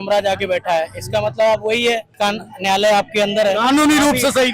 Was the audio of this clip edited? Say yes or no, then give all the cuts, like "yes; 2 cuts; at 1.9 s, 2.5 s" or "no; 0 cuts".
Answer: yes; 1 cut; at 2.1 s